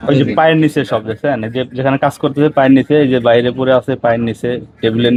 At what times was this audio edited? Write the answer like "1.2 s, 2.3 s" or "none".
none